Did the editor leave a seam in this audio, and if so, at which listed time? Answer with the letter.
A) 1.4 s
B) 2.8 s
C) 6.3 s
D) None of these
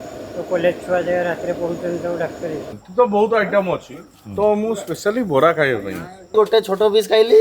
B